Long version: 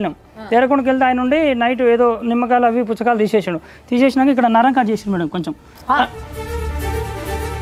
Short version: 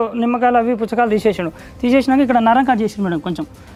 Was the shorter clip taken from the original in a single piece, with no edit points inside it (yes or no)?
yes